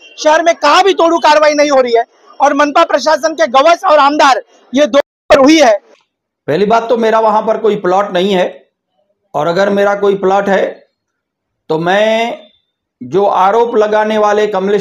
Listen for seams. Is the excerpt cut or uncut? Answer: cut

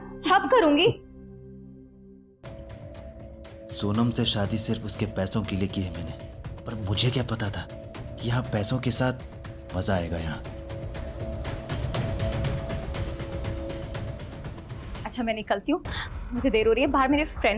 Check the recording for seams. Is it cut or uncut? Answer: uncut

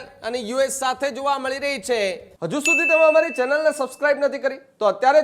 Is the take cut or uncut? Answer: cut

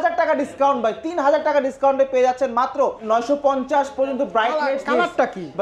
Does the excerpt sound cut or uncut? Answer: cut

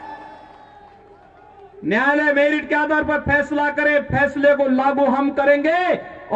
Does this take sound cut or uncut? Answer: uncut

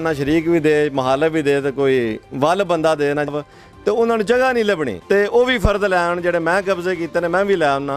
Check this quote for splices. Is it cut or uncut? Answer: cut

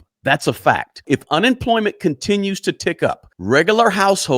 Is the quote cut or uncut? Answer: cut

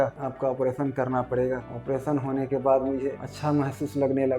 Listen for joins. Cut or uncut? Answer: uncut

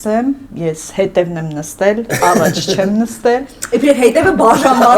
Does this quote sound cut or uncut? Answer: uncut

